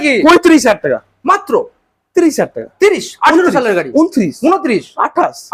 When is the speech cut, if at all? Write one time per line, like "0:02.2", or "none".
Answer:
none